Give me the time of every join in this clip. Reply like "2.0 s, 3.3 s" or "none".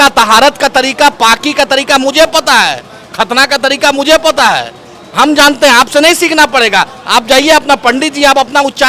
none